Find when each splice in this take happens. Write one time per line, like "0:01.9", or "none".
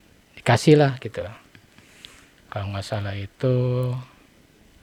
none